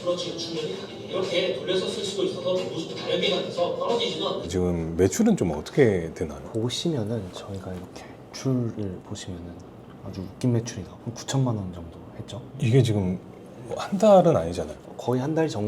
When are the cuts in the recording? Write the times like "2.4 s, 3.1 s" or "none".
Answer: 4.5 s